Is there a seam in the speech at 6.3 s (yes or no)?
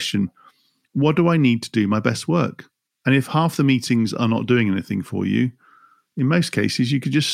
no